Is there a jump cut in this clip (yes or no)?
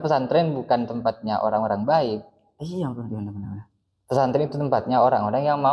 no